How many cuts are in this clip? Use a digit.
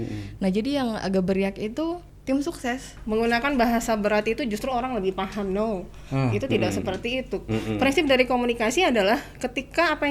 2